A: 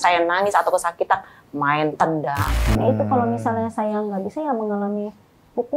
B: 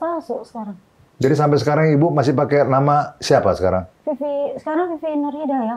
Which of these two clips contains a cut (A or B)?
A